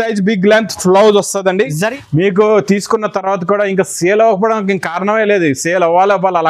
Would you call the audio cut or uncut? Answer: cut